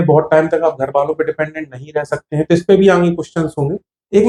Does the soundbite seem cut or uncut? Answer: uncut